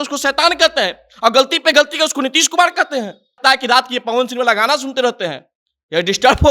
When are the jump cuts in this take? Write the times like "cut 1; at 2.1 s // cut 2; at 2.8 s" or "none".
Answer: cut 1; at 3.4 s